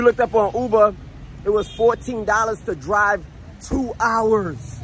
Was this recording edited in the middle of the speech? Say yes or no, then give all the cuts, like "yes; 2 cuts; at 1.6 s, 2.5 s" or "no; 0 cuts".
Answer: no; 0 cuts